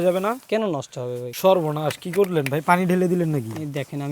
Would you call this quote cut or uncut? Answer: cut